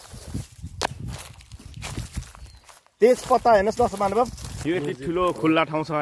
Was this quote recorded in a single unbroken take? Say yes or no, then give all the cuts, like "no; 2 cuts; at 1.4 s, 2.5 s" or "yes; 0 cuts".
no; 1 cut; at 4.4 s